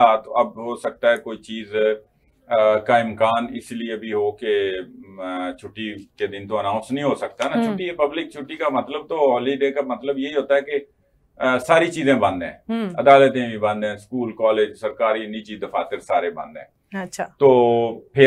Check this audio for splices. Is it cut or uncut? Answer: uncut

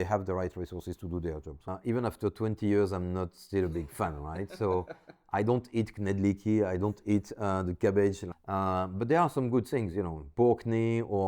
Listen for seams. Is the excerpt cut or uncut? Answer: cut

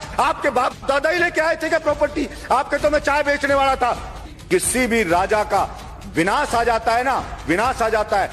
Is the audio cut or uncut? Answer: cut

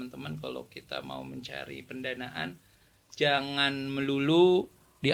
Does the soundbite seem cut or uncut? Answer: uncut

